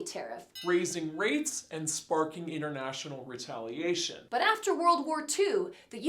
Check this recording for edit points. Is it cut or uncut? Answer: cut